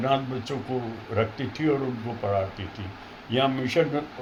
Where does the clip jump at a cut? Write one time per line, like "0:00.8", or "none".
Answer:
none